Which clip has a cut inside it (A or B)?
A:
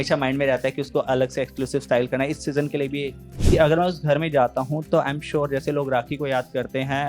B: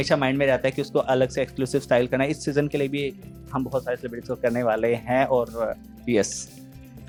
A